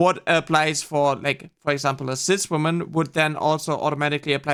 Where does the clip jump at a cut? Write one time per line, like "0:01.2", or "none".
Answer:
none

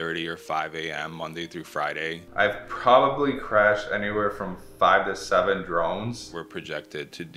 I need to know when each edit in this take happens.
0:02.2
0:06.2

